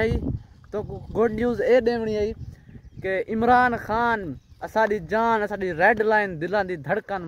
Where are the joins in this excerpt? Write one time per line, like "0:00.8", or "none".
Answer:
none